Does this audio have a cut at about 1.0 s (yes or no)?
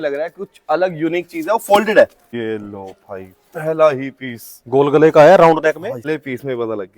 no